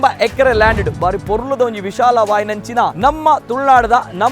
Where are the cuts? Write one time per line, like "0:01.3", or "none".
0:02.9